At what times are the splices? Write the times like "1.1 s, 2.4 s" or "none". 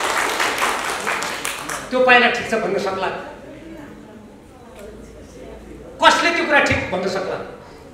none